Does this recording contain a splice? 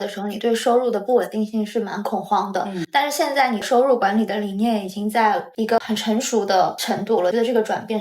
yes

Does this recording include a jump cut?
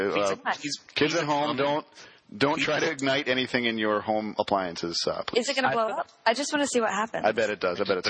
yes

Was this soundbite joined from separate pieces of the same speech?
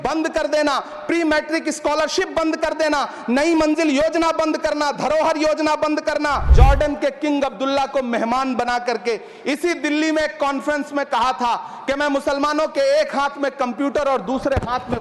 yes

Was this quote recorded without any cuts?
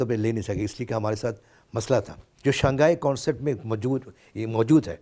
no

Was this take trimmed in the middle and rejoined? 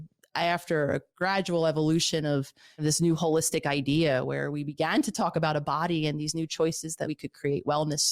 yes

